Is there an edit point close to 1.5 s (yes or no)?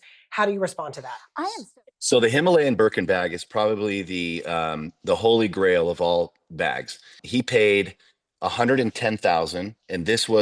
yes